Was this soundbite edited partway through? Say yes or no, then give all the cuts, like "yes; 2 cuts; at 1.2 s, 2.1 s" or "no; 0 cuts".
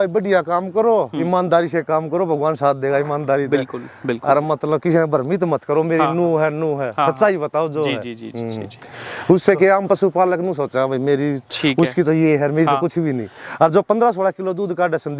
no; 0 cuts